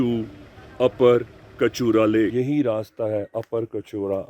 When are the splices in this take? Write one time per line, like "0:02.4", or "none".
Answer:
0:02.3